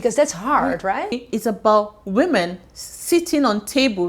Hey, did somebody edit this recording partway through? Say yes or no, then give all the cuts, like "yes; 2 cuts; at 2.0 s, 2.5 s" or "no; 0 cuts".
yes; 1 cut; at 1.2 s